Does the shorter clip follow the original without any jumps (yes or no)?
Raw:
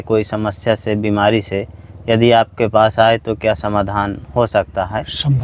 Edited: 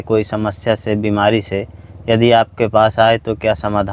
yes